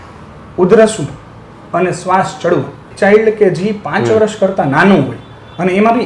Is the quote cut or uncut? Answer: cut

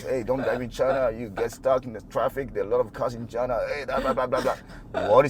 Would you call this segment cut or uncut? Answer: uncut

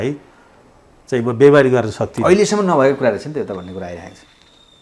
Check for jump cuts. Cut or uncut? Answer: uncut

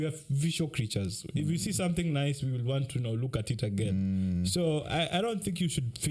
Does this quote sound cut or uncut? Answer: uncut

